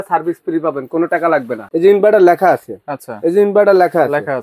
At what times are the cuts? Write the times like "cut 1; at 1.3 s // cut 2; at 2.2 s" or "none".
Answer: cut 1; at 1.6 s